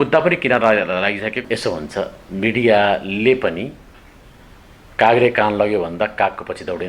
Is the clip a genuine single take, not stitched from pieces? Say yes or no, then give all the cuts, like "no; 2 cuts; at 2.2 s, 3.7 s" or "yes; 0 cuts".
no; 1 cut; at 1.5 s